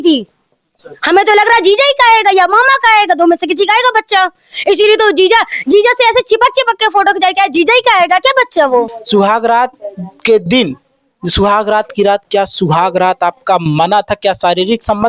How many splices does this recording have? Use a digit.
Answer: 1